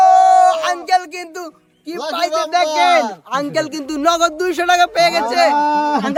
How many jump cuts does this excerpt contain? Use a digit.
0